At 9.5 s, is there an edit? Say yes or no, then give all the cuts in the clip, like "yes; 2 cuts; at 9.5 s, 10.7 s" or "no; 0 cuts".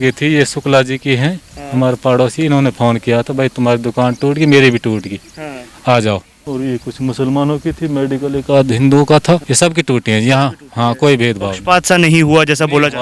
yes; 2 cuts; at 6.4 s, 9.5 s